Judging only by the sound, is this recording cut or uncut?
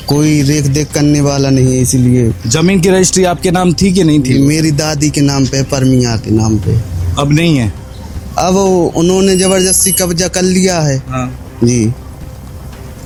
uncut